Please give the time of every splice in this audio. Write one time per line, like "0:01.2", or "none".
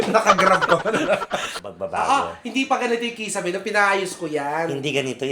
0:01.6